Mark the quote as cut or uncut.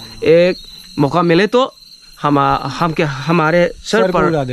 uncut